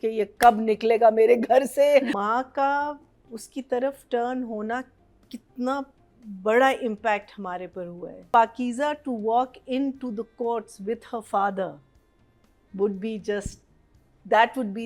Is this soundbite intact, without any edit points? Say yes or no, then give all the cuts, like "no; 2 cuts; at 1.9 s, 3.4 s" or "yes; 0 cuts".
no; 2 cuts; at 2.1 s, 8.3 s